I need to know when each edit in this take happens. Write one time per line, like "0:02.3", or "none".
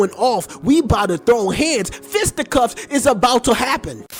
none

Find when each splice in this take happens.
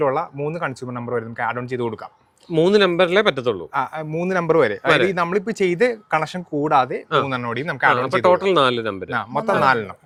none

